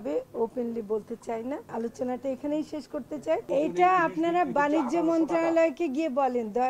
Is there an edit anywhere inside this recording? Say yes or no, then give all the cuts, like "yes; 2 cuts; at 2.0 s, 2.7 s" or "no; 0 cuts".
yes; 2 cuts; at 1.7 s, 3.4 s